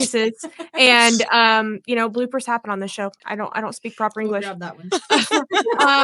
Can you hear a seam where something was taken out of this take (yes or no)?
yes